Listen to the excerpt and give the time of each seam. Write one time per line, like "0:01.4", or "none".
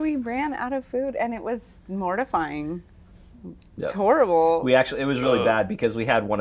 none